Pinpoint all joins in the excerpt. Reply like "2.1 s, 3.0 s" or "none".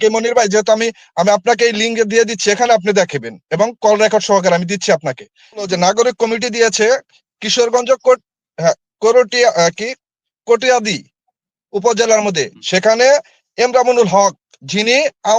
5.6 s